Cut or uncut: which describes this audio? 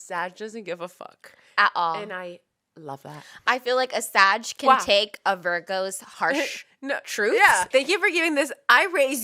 cut